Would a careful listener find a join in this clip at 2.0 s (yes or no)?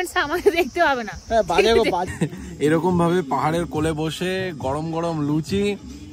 yes